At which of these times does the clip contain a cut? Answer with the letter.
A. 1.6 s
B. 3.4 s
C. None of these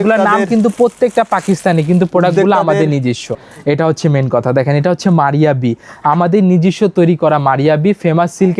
B